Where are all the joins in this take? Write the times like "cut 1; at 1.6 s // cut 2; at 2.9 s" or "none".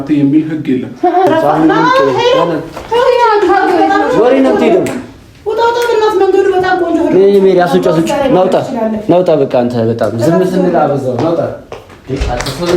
cut 1; at 1.3 s

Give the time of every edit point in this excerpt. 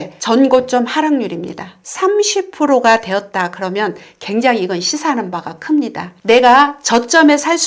cut 1; at 1.9 s // cut 2; at 6.1 s

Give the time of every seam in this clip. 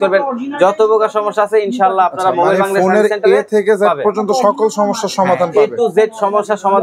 none

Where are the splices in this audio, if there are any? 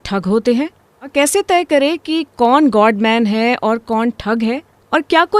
cut 1; at 1.1 s

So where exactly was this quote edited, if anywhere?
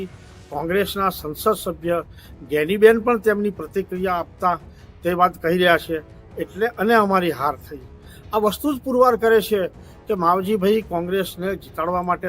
cut 1; at 6.2 s

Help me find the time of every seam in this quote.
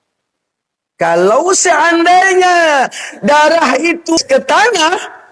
cut 1; at 4.2 s

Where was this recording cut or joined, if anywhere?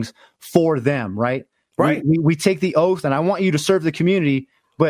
none

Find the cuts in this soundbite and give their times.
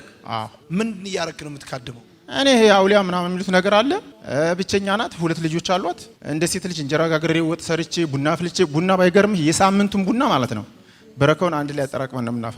cut 1; at 4.2 s // cut 2; at 6.1 s

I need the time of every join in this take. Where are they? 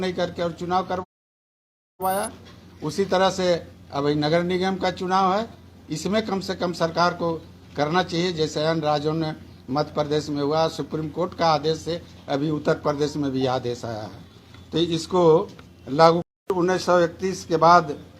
cut 1; at 16.5 s

